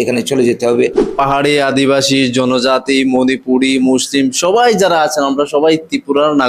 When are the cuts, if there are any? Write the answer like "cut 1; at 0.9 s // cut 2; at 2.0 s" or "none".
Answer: cut 1; at 1.0 s